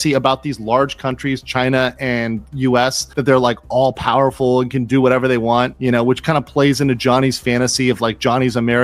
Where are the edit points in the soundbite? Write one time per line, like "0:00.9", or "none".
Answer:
none